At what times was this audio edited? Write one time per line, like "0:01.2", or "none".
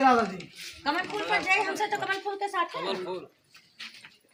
none